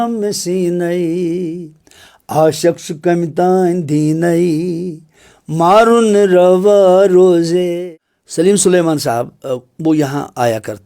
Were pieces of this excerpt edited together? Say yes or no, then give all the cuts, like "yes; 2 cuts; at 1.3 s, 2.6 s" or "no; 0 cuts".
yes; 1 cut; at 7.8 s